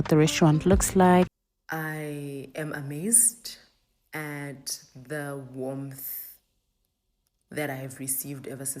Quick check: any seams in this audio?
yes; 1 cut; at 1.3 s

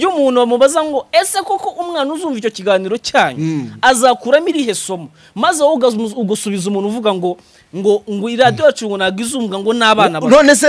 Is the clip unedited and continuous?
yes; 0 cuts

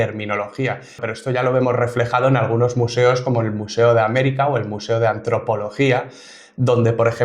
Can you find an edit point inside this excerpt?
yes; 1 cut; at 1.0 s

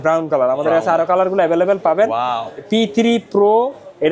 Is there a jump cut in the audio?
no; 0 cuts

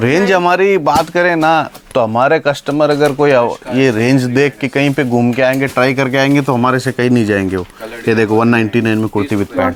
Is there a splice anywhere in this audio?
no; 0 cuts

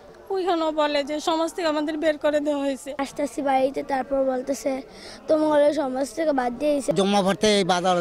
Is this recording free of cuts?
no; 2 cuts; at 3.0 s, 6.9 s

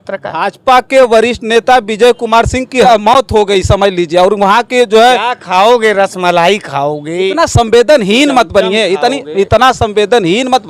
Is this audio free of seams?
no; 1 cut; at 2.8 s

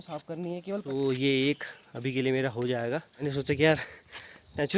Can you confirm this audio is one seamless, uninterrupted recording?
no; 2 cuts; at 0.8 s, 3.3 s

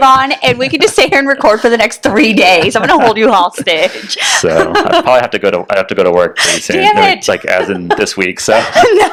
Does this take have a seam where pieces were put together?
no; 0 cuts

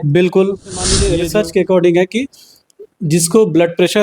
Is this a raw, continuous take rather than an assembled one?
no; 1 cut; at 1.1 s

